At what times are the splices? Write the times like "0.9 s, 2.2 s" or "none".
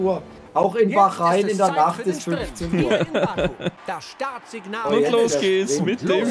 3.8 s